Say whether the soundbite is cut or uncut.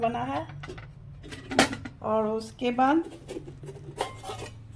uncut